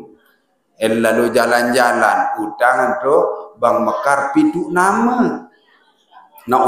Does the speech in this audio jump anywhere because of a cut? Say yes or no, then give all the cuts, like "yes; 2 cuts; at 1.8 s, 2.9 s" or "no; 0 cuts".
no; 0 cuts